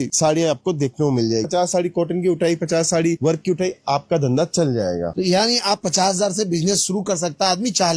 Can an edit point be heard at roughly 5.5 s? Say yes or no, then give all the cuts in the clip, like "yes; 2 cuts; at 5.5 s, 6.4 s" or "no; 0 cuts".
no; 1 cut; at 1.5 s